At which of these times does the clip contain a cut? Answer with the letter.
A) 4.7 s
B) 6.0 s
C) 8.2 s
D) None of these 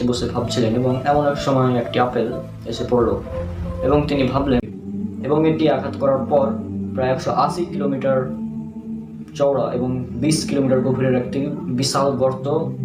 A